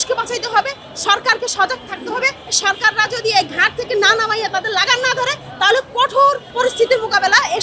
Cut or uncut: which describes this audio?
cut